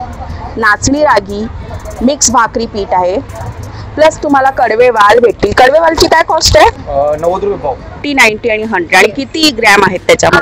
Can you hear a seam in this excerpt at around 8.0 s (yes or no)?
yes